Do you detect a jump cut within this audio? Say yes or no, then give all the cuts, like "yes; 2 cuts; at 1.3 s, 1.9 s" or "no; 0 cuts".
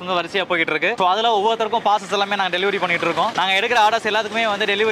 no; 0 cuts